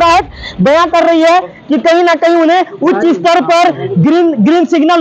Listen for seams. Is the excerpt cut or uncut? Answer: uncut